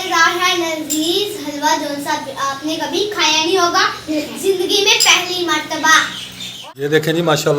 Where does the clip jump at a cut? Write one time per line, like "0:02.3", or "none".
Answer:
0:06.6